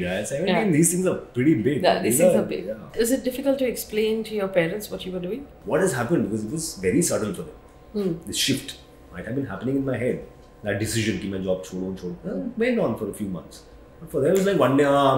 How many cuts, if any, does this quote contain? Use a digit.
2